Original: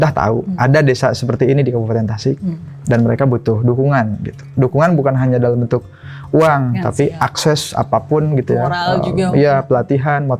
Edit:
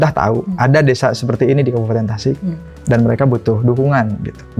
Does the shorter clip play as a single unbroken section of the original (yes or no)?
yes